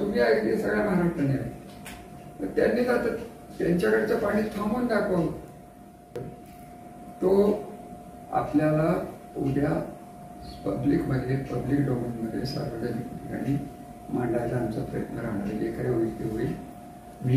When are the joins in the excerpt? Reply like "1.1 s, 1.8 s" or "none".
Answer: 6.2 s